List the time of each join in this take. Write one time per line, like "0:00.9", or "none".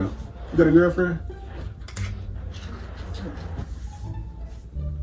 0:03.4